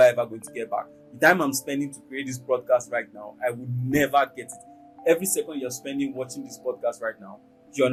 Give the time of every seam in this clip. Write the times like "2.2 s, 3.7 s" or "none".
none